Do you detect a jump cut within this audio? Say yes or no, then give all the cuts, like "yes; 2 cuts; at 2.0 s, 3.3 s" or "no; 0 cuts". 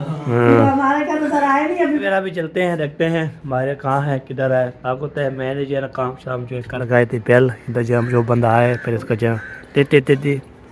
yes; 2 cuts; at 2.0 s, 6.8 s